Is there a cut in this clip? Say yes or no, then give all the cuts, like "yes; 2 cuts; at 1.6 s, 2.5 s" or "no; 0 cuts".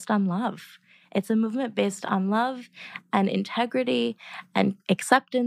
no; 0 cuts